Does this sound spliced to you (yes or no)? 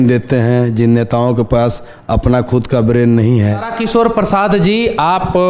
yes